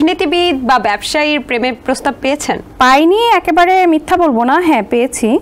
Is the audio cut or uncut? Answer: cut